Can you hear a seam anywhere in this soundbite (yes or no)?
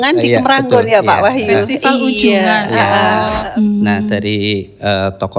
yes